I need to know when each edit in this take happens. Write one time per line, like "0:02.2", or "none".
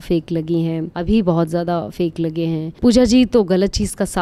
0:00.9
0:02.7